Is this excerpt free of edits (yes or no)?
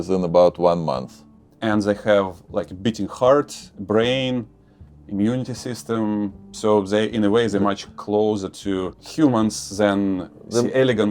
no